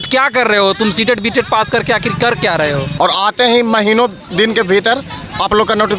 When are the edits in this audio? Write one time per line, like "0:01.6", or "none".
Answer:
0:02.9